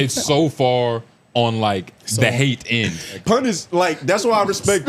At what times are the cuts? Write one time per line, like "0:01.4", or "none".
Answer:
0:03.2